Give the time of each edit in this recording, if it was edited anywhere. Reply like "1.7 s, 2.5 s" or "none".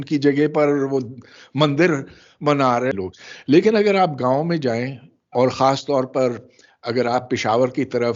2.9 s